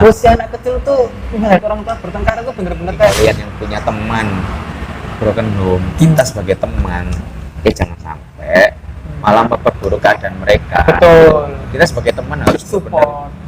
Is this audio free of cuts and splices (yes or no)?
no